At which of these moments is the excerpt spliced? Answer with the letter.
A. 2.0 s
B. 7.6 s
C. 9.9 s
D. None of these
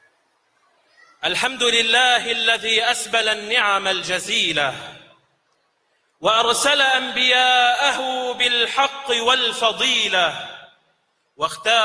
A